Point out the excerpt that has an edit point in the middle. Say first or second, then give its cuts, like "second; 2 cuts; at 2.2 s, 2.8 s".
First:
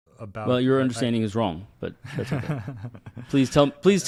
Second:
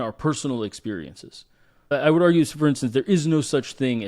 second; 1 cut; at 1.9 s